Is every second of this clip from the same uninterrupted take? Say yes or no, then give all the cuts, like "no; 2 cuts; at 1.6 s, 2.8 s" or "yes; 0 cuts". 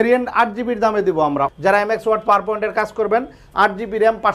no; 1 cut; at 1.5 s